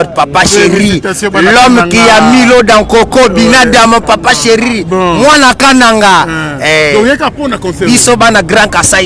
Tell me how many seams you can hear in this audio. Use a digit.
0